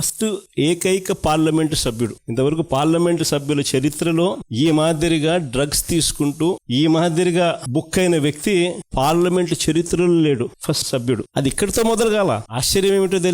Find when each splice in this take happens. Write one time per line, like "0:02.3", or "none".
none